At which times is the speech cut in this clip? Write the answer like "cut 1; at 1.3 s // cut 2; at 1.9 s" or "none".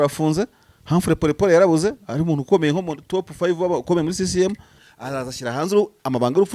cut 1; at 4.8 s